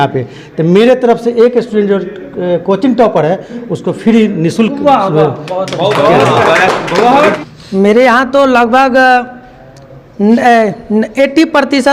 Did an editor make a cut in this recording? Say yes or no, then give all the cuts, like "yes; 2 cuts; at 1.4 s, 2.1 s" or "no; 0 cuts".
yes; 1 cut; at 7.4 s